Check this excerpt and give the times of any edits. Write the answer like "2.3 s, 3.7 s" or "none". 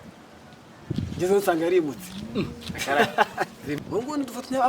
3.8 s